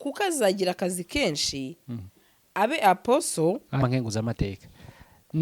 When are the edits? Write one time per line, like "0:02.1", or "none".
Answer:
0:03.8